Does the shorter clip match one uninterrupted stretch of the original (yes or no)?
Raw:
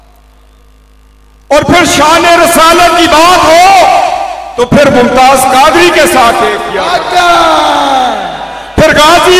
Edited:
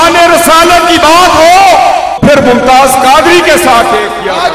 no